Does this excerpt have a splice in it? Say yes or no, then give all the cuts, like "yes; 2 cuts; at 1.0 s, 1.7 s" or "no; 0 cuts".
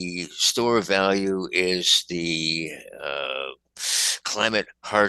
no; 0 cuts